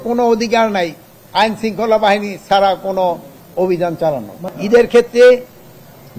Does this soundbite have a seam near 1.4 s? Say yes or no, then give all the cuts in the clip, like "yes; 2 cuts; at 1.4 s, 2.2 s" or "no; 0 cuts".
no; 1 cut; at 4.5 s